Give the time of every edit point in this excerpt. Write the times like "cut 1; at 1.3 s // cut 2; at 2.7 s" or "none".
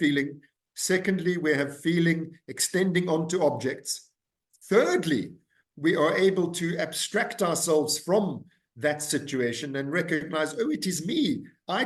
none

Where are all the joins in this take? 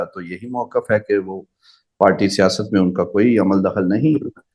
none

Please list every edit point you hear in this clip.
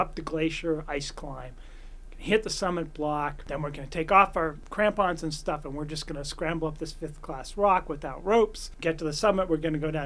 cut 1; at 3.4 s // cut 2; at 4.6 s // cut 3; at 8.7 s

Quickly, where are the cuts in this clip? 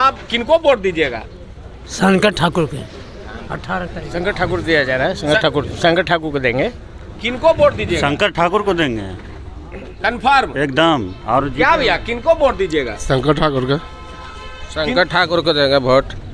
none

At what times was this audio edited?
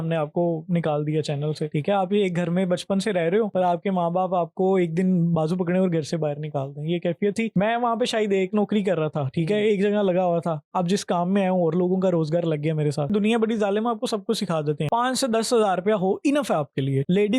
cut 1; at 1.7 s // cut 2; at 7.5 s // cut 3; at 13.1 s // cut 4; at 14.8 s

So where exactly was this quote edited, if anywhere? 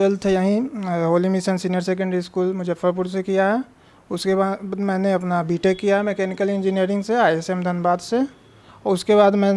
none

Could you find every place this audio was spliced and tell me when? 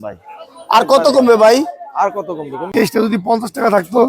cut 1; at 2.7 s

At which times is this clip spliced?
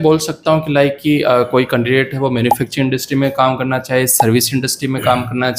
none

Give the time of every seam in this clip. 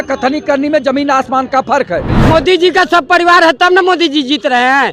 cut 1; at 2.1 s

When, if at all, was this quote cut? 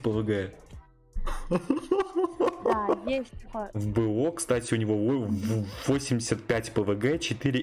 cut 1; at 3.7 s

